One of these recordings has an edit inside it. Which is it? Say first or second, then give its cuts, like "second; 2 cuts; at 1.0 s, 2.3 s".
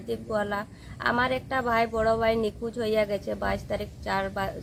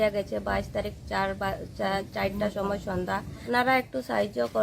second; 1 cut; at 3.4 s